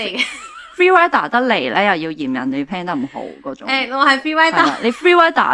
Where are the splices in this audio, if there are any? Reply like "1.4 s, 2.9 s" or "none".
none